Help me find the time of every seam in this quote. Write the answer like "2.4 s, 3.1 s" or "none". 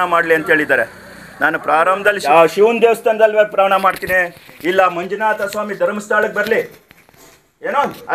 2.2 s